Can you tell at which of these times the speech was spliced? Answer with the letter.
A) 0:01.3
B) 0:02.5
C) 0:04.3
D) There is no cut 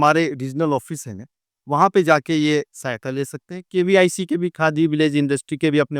D